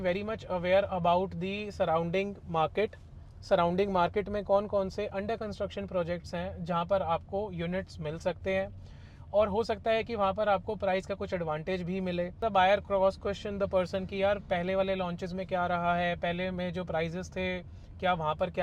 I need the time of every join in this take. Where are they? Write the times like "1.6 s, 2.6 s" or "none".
12.4 s